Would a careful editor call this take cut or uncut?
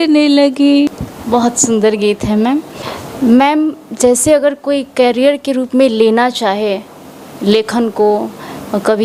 uncut